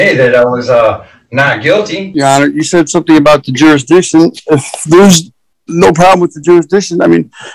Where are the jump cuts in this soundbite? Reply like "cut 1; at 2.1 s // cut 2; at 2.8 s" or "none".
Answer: cut 1; at 2.0 s